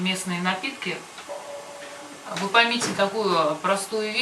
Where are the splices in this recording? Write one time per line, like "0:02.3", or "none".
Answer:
0:01.6